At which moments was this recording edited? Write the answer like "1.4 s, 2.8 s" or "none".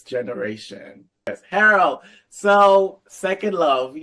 1.3 s

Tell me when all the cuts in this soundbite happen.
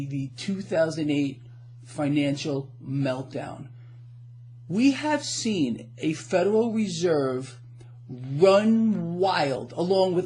2.9 s

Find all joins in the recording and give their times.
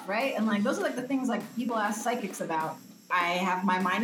2.8 s

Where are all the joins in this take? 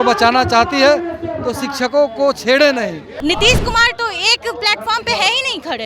3.1 s

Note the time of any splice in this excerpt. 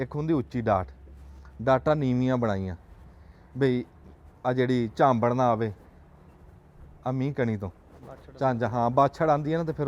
none

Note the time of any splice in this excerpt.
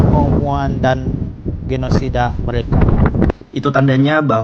3.3 s

